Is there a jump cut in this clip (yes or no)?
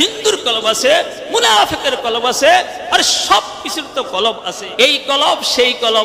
yes